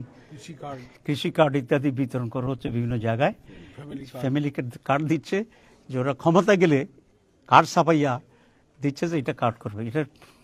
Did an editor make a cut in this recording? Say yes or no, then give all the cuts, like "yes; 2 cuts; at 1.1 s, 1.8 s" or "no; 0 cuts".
no; 0 cuts